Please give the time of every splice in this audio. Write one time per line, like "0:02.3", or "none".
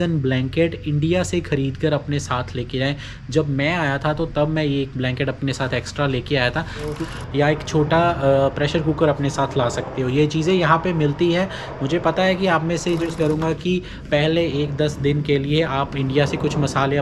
0:07.0
0:13.1

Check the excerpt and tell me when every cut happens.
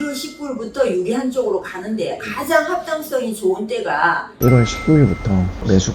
0:04.3

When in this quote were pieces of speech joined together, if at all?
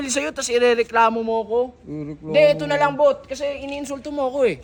none

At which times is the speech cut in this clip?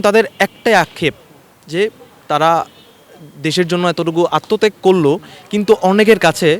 none

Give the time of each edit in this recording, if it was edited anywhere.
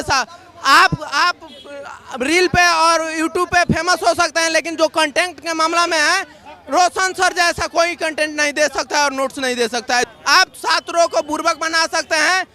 0:10.1

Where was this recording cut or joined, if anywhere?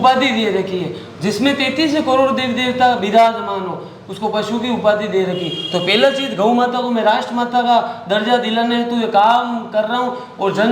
none

